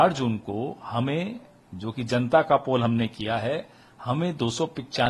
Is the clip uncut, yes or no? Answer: yes